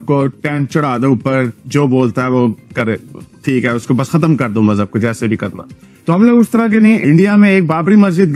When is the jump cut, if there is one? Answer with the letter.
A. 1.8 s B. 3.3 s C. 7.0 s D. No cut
C